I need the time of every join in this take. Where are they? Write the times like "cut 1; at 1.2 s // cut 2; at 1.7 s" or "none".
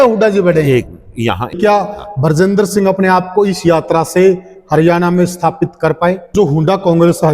cut 1; at 1.6 s // cut 2; at 6.2 s